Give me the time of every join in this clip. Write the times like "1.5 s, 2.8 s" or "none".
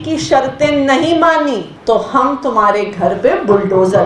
1.7 s